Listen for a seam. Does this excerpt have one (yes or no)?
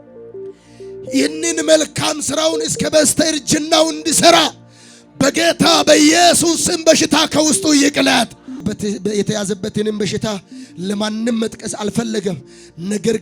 yes